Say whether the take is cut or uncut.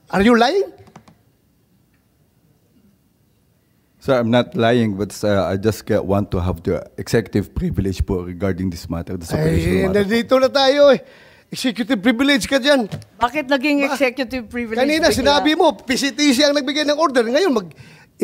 uncut